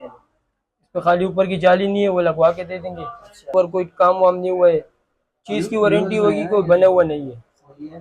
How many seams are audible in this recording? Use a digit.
1